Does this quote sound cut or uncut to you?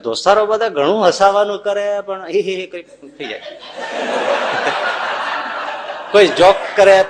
uncut